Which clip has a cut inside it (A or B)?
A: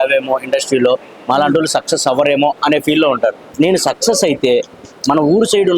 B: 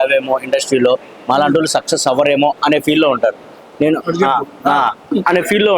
A